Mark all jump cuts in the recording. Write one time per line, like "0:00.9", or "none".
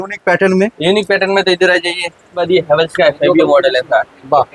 0:02.4